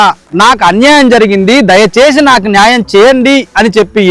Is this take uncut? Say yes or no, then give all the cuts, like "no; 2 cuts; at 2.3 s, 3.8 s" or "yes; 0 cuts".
yes; 0 cuts